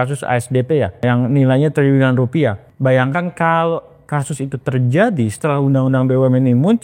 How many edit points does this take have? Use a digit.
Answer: 2